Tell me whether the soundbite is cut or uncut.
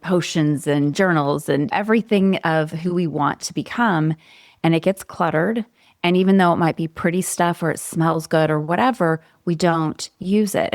cut